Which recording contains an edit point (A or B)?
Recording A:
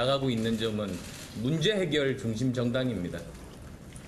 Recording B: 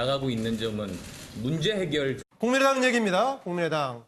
A